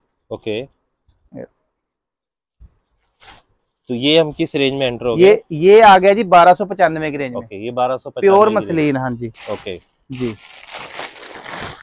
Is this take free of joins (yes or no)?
yes